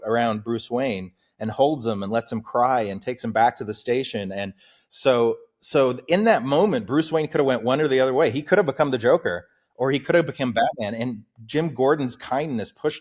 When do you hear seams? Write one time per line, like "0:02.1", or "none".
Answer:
none